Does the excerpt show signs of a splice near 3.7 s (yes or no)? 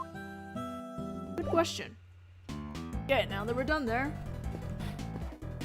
yes